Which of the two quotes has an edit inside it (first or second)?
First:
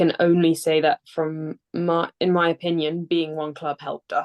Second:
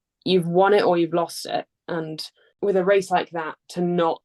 second